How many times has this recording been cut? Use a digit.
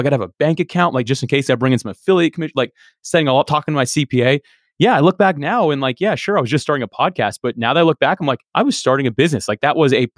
1